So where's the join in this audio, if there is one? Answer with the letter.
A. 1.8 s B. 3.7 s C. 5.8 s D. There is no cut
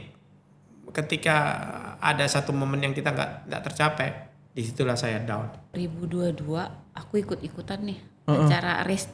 C